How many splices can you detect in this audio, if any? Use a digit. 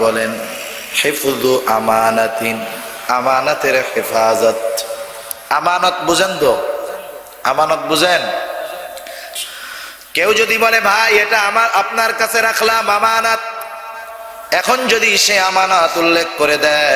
1